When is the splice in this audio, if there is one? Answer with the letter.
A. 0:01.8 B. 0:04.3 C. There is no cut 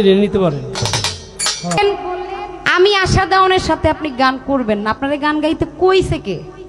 A